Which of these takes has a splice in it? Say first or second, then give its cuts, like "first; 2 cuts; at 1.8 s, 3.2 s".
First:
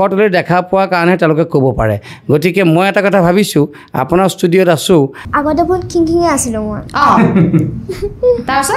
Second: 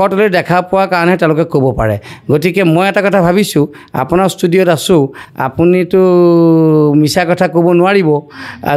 first; 1 cut; at 5.2 s